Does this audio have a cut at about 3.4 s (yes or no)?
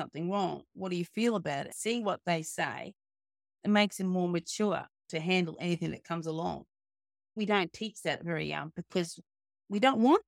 yes